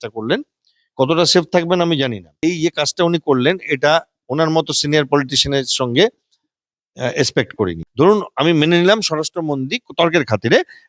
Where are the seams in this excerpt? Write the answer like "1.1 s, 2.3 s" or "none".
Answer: 2.3 s, 7.8 s

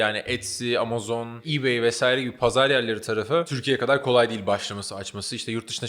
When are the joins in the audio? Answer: 1.5 s, 3.6 s

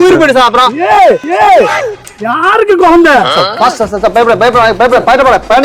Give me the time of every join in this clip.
3.5 s

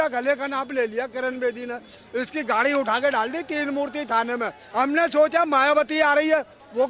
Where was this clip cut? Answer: 4.6 s

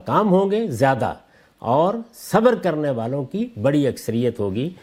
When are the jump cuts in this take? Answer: none

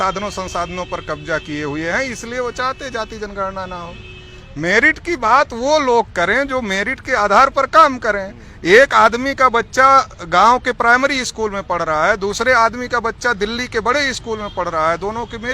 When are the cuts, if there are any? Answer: none

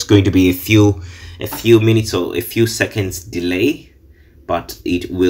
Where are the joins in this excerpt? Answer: none

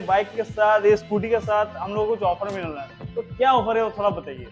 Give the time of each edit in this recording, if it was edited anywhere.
none

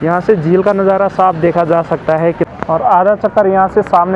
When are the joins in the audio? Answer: 2.5 s

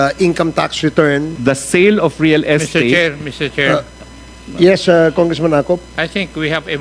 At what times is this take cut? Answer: 1.3 s

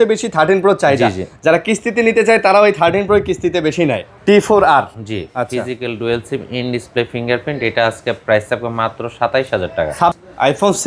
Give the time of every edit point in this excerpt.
4.1 s, 10.1 s

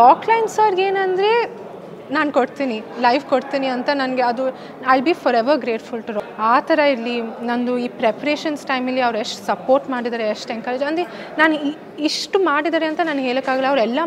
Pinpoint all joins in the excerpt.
6.2 s

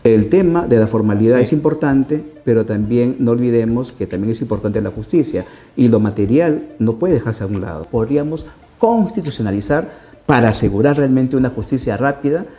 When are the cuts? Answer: 7.8 s

